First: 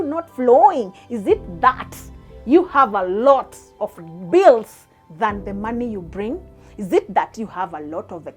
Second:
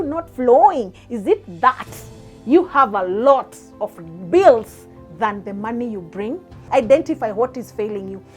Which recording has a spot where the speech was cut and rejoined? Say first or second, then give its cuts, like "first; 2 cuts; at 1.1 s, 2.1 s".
second; 1 cut; at 6.5 s